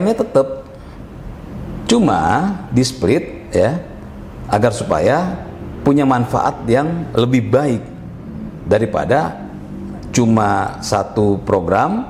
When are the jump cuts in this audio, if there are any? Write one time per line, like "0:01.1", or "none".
none